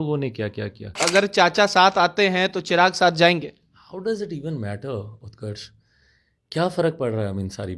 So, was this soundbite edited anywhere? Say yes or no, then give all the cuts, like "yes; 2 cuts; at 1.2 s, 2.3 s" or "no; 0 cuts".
yes; 1 cut; at 1.0 s